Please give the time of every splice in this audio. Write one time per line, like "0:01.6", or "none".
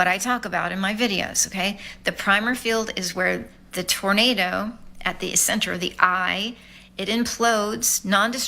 0:05.7